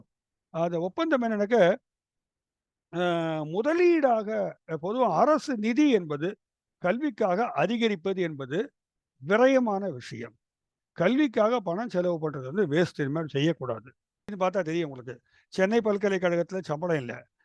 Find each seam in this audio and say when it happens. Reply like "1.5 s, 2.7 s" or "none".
14.3 s